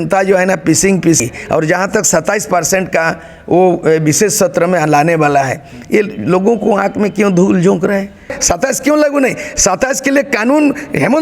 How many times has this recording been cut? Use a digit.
2